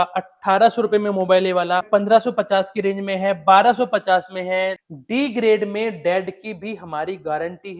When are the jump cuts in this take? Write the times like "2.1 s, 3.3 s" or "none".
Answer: 1.9 s, 4.8 s